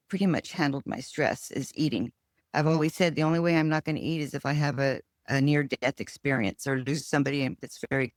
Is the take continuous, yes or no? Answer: yes